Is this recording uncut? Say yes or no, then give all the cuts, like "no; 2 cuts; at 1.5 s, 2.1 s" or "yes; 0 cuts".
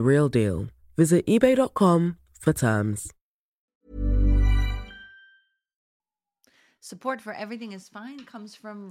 yes; 0 cuts